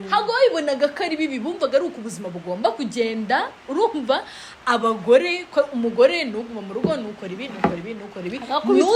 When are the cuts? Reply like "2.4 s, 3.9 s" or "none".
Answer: none